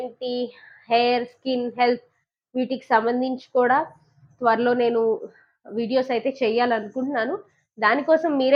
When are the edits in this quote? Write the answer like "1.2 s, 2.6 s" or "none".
none